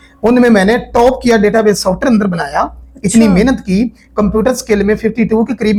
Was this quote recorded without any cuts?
yes; 0 cuts

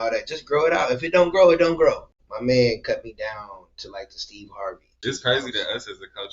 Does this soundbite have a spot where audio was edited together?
yes; 2 cuts; at 2.2 s, 4.9 s

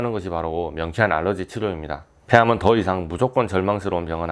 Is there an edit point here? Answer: yes; 1 cut; at 2.2 s

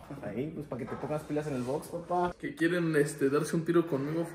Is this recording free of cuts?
no; 1 cut; at 2.4 s

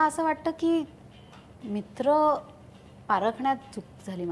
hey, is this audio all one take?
yes; 0 cuts

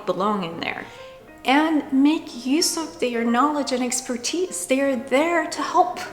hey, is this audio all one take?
no; 1 cut; at 1.2 s

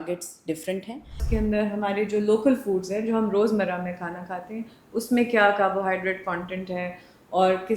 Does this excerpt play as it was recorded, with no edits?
no; 1 cut; at 1.2 s

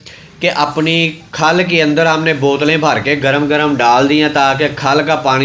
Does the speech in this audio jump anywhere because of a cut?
no; 0 cuts

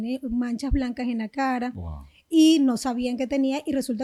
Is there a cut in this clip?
no; 0 cuts

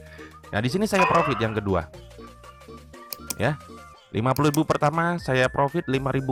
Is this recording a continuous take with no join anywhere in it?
yes; 0 cuts

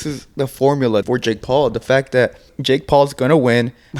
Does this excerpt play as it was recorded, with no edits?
no; 2 cuts; at 1.0 s, 2.5 s

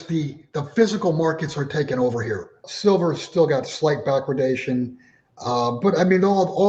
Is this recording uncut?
no; 1 cut; at 2.7 s

